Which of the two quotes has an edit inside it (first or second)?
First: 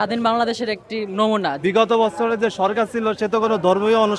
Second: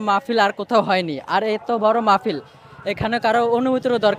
first